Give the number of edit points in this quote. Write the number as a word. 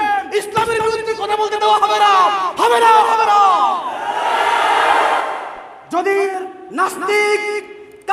one